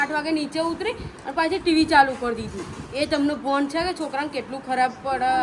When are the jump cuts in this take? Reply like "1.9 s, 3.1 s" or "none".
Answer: none